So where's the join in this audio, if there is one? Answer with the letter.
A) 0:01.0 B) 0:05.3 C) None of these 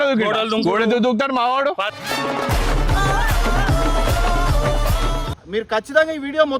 B